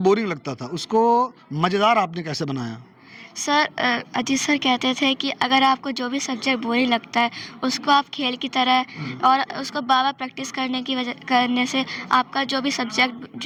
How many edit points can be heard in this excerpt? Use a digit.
0